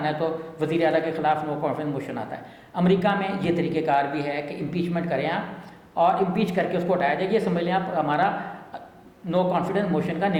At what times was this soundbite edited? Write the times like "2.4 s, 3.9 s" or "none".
none